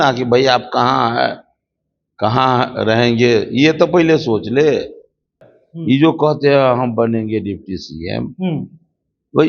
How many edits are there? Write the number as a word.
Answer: one